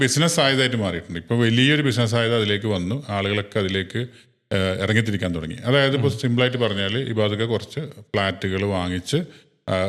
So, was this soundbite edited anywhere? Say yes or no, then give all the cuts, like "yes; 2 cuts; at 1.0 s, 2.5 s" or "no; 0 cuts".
no; 0 cuts